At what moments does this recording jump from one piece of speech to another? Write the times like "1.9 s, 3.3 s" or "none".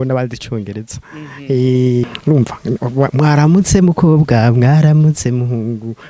2.0 s